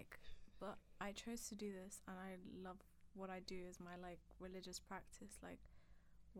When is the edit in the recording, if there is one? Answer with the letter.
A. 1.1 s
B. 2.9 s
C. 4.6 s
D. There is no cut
D